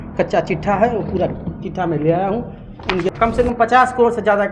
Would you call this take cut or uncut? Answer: cut